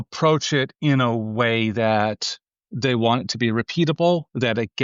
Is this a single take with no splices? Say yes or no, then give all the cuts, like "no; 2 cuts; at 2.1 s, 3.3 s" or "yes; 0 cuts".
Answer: yes; 0 cuts